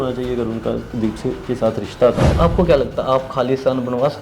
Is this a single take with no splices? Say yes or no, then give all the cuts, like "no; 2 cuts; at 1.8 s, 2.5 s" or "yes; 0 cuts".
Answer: no; 1 cut; at 2.3 s